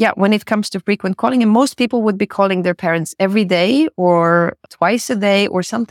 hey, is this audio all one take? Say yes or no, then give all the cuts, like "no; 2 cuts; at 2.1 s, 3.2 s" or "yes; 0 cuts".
yes; 0 cuts